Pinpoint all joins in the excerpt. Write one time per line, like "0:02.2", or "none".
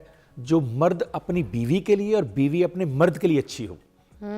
none